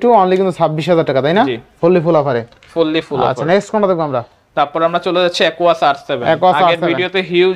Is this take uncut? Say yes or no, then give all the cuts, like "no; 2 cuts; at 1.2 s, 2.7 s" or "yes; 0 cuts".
yes; 0 cuts